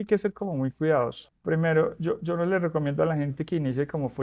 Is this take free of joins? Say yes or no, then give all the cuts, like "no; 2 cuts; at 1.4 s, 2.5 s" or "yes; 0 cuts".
no; 1 cut; at 1.3 s